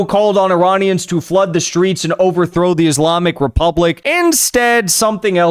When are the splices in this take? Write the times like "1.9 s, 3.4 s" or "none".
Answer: 4.0 s